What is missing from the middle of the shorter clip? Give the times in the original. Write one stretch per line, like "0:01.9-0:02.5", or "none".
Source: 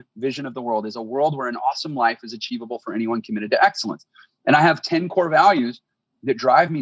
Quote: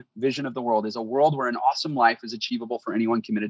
none